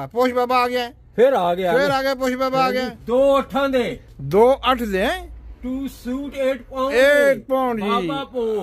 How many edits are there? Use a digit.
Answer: 1